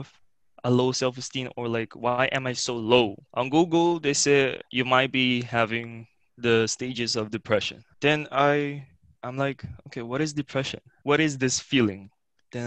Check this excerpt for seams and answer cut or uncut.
cut